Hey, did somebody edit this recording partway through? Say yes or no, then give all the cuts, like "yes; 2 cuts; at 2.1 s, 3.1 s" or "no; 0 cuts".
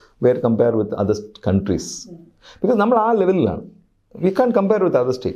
no; 0 cuts